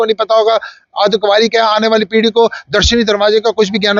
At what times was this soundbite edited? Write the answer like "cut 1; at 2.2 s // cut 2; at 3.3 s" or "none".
none